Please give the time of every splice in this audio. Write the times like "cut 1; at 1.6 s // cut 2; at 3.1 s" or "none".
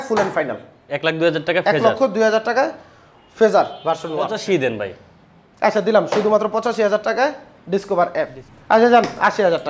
cut 1; at 4.4 s // cut 2; at 8.4 s